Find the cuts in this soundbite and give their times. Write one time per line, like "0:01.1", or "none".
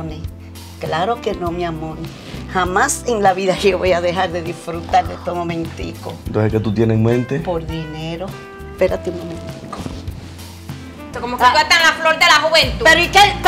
0:11.1